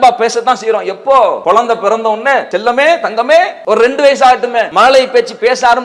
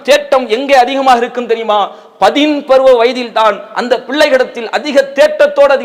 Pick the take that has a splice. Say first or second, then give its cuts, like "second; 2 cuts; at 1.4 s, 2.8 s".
first; 4 cuts; at 1.4 s, 2.5 s, 3.6 s, 4.7 s